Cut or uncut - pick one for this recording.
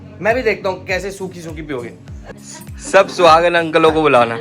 cut